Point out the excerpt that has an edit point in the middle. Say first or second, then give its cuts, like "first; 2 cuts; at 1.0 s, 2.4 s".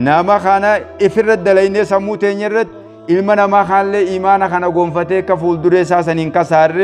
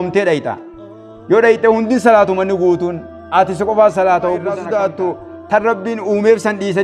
second; 1 cut; at 4.6 s